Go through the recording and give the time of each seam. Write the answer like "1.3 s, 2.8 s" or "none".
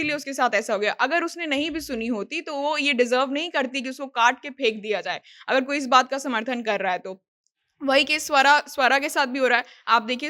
none